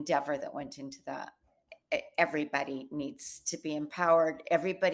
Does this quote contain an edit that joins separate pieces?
yes; 1 cut; at 1.7 s

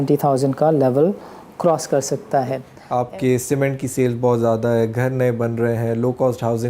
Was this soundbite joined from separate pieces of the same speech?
yes; 1 cut; at 2.7 s

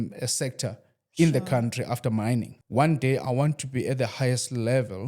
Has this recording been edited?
yes; 1 cut; at 2.6 s

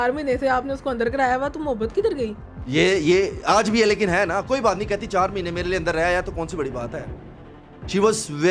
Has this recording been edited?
no; 0 cuts

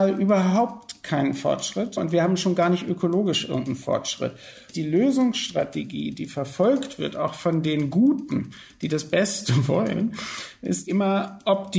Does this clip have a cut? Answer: yes; 3 cuts; at 2.0 s, 4.7 s, 10.8 s

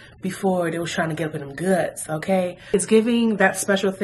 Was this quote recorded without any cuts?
no; 1 cut; at 2.7 s

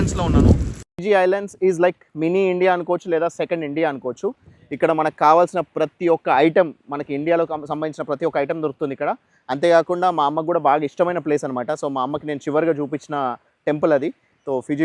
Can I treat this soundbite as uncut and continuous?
yes; 0 cuts

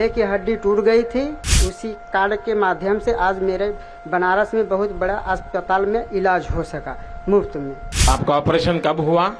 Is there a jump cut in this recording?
yes; 2 cuts; at 1.5 s, 8.1 s

